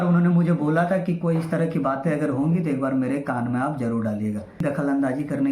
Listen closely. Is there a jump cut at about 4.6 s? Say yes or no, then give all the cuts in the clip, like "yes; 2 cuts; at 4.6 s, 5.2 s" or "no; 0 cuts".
yes; 1 cut; at 4.6 s